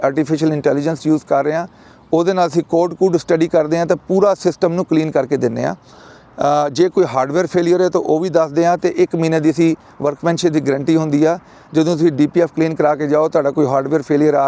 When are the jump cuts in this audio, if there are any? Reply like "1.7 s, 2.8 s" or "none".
none